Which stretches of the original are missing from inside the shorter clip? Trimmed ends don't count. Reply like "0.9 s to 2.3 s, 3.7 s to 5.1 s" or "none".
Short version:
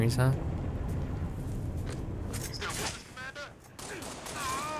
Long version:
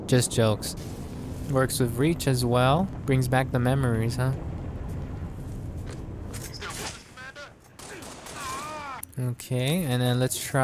none